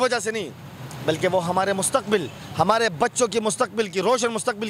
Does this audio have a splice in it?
no; 0 cuts

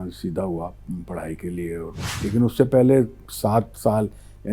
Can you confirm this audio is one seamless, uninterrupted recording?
no; 1 cut; at 2.0 s

